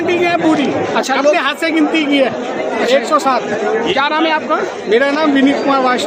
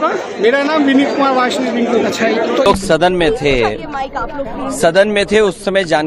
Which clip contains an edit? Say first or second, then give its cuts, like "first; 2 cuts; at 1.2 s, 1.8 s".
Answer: second; 1 cut; at 2.6 s